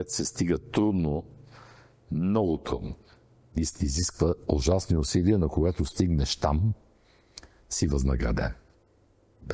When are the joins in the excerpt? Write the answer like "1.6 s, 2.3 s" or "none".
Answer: none